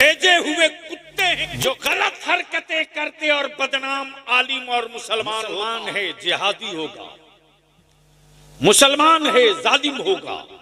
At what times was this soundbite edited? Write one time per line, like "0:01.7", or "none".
0:01.5
0:05.8